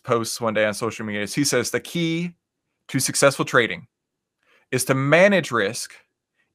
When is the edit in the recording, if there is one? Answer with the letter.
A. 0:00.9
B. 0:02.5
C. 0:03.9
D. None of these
D